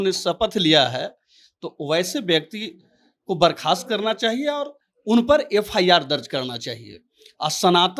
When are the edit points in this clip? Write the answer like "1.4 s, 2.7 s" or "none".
none